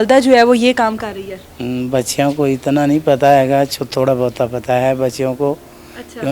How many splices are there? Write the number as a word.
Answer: zero